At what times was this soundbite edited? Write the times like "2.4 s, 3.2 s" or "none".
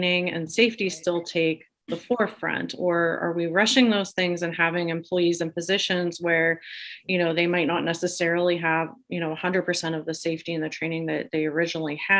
none